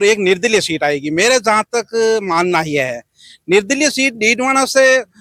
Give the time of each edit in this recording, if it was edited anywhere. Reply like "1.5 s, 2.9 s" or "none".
none